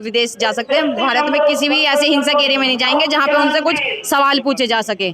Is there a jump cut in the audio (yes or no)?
no